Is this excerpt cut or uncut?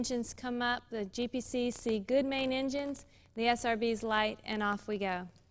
cut